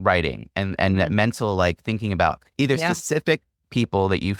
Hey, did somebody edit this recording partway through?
no; 0 cuts

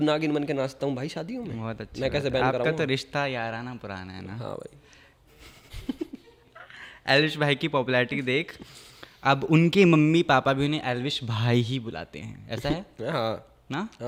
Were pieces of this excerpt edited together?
no; 0 cuts

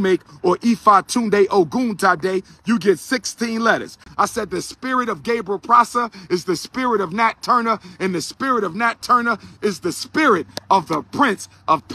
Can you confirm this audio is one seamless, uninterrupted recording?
no; 1 cut; at 4.0 s

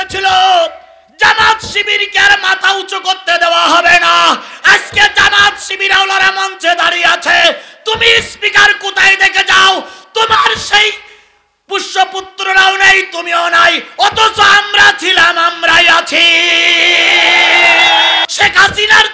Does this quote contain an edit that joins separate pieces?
yes; 1 cut; at 18.3 s

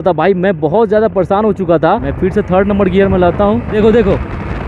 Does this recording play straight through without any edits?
no; 2 cuts; at 2.1 s, 3.7 s

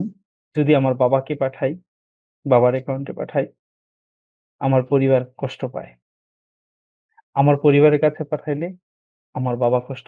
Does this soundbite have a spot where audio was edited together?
no; 0 cuts

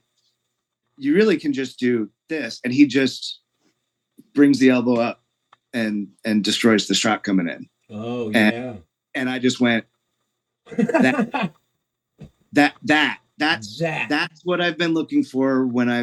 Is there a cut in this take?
no; 0 cuts

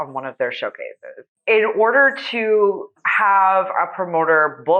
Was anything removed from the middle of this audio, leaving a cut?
yes; 1 cut; at 1.3 s

